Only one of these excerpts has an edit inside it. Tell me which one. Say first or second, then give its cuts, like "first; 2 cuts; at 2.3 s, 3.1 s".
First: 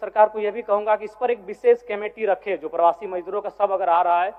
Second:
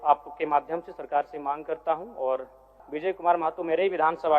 second; 1 cut; at 2.8 s